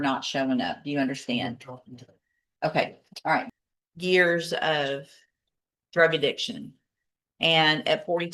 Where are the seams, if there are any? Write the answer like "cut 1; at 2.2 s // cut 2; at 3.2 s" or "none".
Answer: cut 1; at 3.5 s